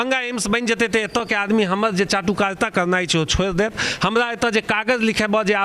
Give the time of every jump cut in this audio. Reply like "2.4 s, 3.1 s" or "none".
none